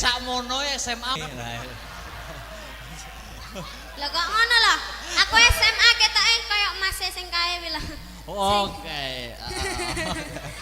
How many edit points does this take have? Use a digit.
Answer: 1